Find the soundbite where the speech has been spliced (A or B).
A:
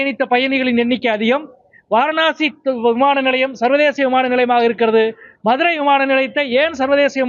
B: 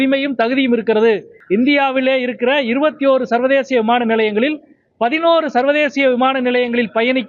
B